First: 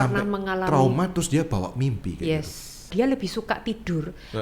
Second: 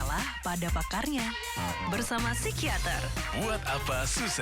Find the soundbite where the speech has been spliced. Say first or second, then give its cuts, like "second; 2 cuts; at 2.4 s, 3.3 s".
first; 1 cut; at 2.9 s